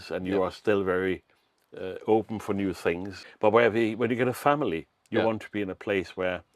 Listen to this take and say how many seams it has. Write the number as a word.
one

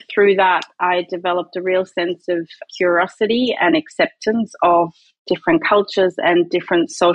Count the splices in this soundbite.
zero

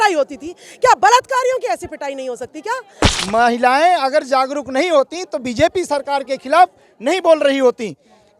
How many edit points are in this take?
one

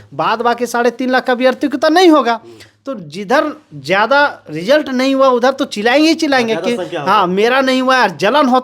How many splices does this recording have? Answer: zero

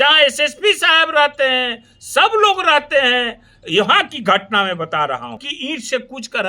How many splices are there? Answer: one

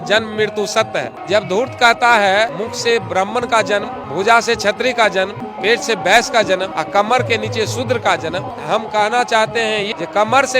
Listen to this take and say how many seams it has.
seven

